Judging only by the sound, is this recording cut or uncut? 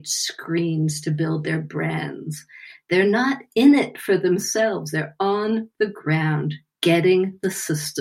uncut